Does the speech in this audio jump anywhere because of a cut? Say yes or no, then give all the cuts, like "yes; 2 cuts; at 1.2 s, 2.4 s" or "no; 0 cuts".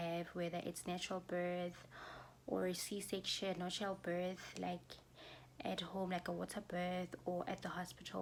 no; 0 cuts